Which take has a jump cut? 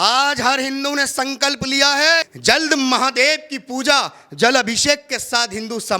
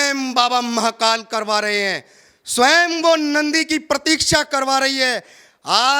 first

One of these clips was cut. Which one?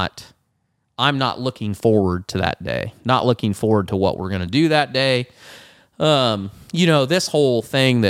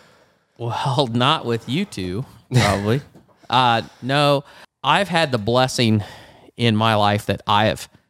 second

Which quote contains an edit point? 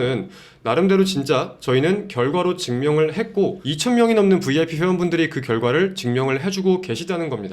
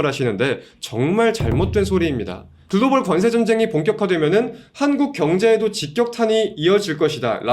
second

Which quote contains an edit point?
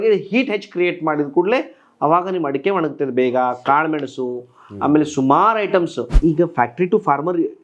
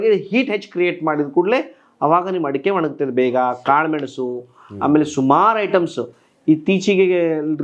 first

